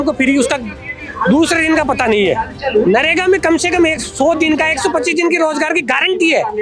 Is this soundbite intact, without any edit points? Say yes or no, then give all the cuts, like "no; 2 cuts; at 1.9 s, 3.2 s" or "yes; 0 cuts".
yes; 0 cuts